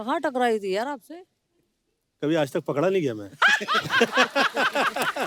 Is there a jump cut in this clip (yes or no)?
no